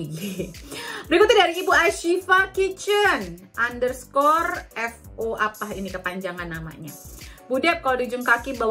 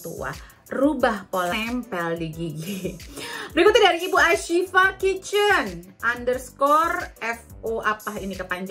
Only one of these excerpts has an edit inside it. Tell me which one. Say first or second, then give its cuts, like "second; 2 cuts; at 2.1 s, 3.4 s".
second; 1 cut; at 1.5 s